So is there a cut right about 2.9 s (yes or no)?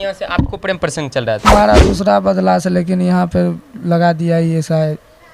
no